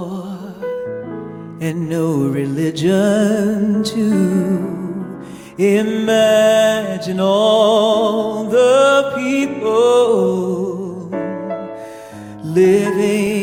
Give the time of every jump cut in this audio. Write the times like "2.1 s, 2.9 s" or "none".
none